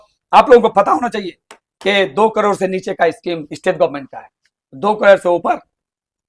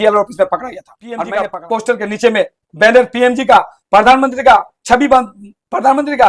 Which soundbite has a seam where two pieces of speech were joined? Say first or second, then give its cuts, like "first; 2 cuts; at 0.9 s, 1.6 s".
second; 1 cut; at 1.2 s